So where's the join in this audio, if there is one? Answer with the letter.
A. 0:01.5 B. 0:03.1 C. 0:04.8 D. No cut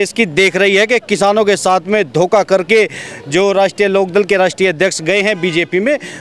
D